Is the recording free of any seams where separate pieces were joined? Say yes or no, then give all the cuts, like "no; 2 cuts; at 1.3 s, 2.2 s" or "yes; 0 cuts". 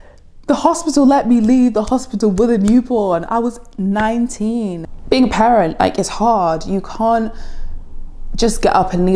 no; 1 cut; at 4.8 s